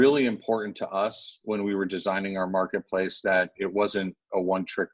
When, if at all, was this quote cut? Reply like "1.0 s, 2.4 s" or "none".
none